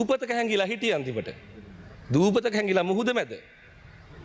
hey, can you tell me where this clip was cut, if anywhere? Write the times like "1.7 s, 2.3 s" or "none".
none

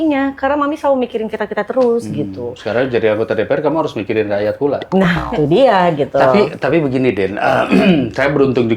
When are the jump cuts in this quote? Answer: none

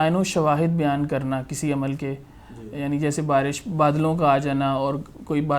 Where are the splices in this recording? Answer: none

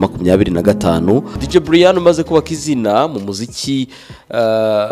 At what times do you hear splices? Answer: 1.4 s

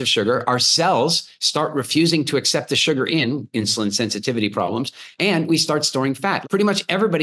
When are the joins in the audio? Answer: 6.3 s

